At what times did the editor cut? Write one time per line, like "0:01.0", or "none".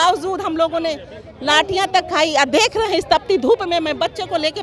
none